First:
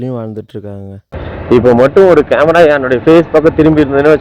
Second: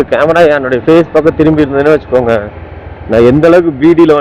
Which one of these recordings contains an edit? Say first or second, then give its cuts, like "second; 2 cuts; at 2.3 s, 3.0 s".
first; 1 cut; at 1.1 s